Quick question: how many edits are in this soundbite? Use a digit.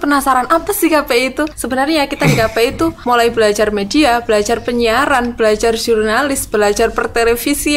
2